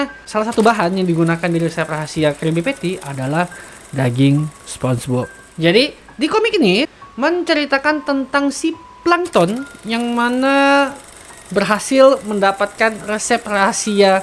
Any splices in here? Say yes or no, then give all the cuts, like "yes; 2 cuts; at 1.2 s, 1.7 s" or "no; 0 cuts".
yes; 1 cut; at 6.9 s